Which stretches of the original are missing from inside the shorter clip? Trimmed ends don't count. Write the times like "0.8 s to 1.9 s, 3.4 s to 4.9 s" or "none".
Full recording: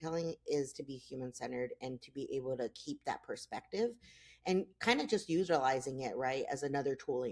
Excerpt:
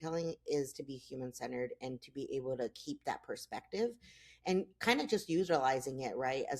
none